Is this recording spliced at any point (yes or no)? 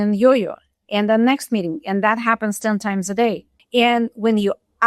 yes